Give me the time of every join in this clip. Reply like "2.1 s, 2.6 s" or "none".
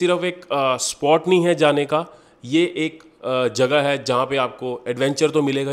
none